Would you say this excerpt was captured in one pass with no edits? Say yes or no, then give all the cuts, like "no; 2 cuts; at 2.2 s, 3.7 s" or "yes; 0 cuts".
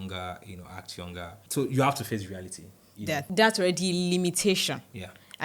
no; 2 cuts; at 1.4 s, 3.3 s